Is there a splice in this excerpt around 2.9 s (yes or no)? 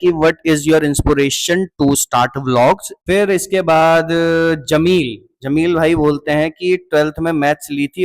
yes